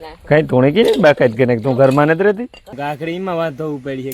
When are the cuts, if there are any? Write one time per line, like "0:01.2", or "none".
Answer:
0:02.7